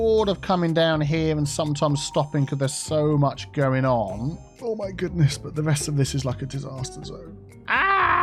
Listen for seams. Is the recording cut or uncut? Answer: cut